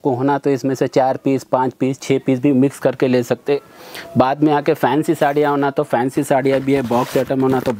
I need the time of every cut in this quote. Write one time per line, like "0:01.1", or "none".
none